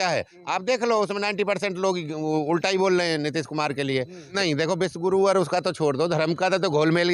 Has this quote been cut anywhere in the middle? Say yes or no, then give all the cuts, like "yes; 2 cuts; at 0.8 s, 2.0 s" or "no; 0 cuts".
yes; 1 cut; at 4.2 s